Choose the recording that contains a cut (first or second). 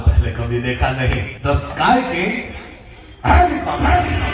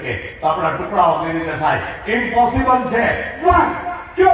first